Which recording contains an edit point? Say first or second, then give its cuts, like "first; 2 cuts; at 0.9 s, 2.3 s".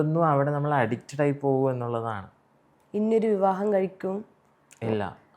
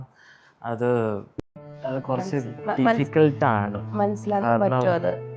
first; 1 cut; at 2.7 s